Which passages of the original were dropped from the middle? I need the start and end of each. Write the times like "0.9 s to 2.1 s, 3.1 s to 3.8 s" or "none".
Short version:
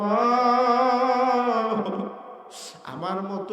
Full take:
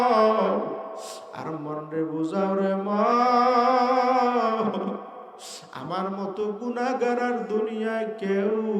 none